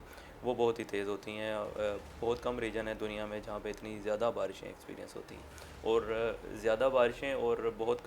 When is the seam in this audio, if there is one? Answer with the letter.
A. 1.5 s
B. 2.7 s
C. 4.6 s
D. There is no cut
D